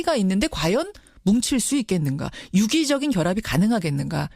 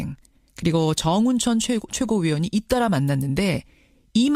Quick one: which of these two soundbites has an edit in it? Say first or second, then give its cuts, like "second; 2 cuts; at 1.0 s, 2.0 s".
first; 1 cut; at 2.4 s